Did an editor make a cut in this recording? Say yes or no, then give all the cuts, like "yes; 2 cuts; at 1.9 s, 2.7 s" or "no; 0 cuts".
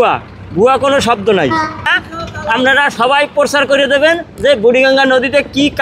yes; 1 cut; at 1.9 s